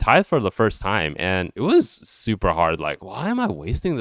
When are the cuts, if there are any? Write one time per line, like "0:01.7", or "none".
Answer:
0:01.5
0:03.1